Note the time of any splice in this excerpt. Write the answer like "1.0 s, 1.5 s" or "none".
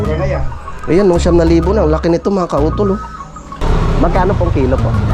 3.5 s